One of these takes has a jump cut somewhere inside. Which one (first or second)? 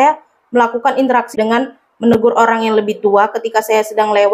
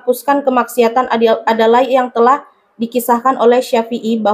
first